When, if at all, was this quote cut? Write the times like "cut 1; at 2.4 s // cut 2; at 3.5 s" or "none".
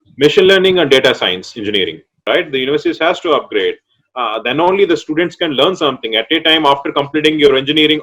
cut 1; at 2.2 s